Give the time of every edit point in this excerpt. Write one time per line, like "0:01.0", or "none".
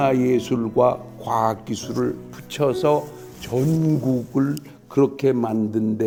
none